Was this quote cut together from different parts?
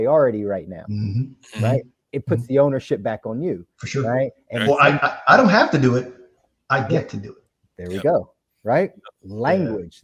no; 0 cuts

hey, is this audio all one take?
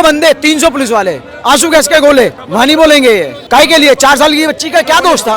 no; 2 cuts; at 2.4 s, 3.4 s

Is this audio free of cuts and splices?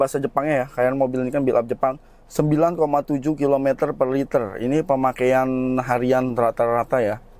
yes; 0 cuts

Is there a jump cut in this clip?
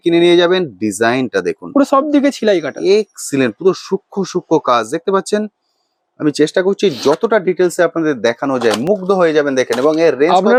no; 0 cuts

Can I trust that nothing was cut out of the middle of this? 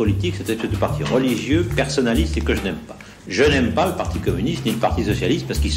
yes; 0 cuts

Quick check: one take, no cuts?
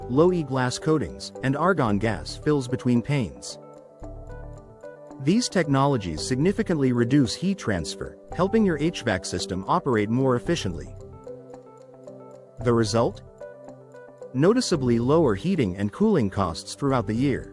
no; 2 cuts; at 10.9 s, 12.3 s

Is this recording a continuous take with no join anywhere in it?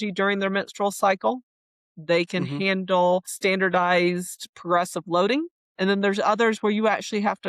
no; 1 cut; at 3.3 s

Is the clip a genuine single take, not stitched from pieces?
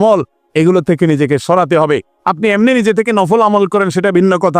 yes; 0 cuts

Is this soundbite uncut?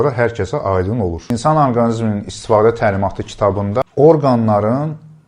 no; 2 cuts; at 1.3 s, 3.8 s

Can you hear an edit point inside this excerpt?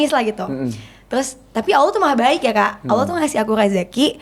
no; 0 cuts

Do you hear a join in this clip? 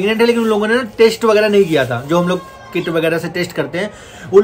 no; 0 cuts

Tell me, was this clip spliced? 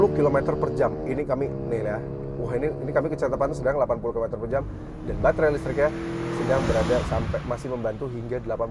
no; 0 cuts

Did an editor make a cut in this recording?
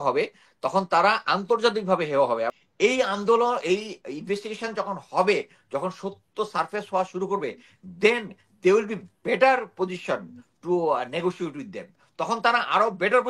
yes; 1 cut; at 2.6 s

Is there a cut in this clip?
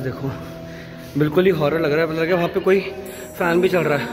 no; 0 cuts

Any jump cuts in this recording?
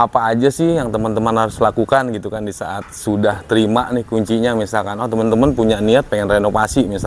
no; 0 cuts

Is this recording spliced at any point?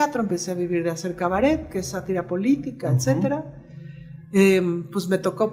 no; 0 cuts

